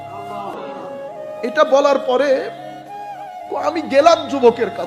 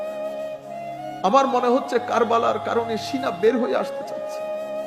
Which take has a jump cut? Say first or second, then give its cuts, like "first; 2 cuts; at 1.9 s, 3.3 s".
second; 1 cut; at 1.1 s